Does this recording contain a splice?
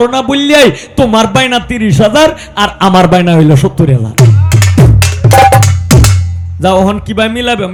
no; 0 cuts

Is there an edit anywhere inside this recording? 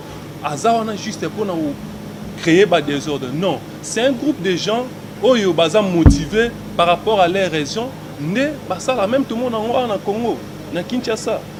no; 0 cuts

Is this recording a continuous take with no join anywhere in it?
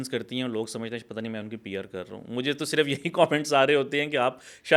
yes; 0 cuts

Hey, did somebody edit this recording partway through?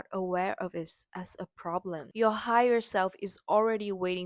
yes; 1 cut; at 2.1 s

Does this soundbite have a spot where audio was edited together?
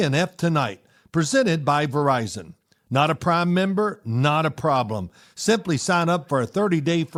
no; 0 cuts

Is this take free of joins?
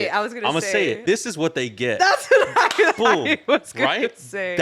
no; 1 cut; at 1.0 s

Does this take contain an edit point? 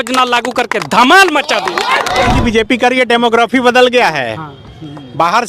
yes; 1 cut; at 2.3 s

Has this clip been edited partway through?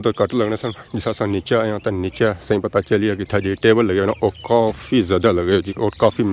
no; 0 cuts

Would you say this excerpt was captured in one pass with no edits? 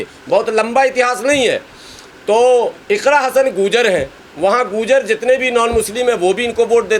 yes; 0 cuts

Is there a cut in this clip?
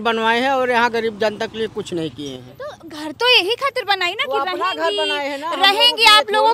no; 0 cuts

